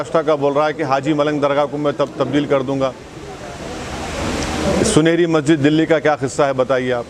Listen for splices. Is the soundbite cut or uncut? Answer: uncut